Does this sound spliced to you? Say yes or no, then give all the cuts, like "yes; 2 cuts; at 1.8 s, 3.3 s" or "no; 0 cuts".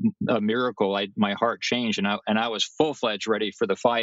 no; 0 cuts